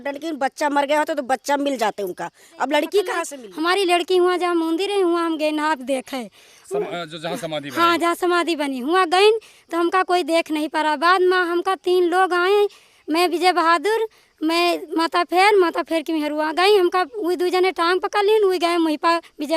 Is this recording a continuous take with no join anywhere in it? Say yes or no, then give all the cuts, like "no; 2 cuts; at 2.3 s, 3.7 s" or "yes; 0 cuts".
no; 1 cut; at 3.4 s